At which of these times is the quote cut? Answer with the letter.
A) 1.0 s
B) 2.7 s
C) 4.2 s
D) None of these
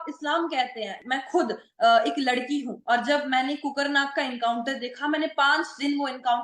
A